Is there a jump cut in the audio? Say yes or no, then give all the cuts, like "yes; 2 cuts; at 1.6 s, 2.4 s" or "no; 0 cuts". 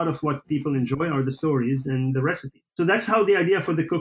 yes; 1 cut; at 2.5 s